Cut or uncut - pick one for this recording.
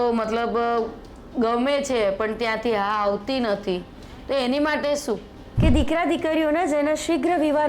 cut